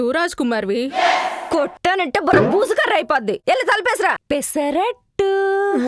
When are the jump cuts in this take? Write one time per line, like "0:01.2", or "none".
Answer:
0:04.2